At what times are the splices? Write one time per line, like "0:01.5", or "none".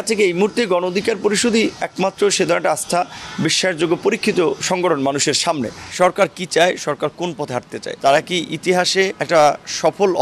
0:05.8
0:07.8
0:09.2